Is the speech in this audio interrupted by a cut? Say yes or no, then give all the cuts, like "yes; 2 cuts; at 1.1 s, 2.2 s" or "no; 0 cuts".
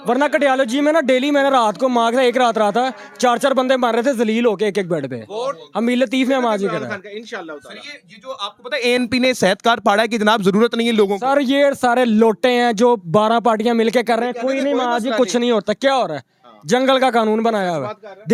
no; 0 cuts